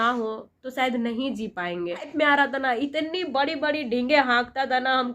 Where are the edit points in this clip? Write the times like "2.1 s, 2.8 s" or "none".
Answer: 2.1 s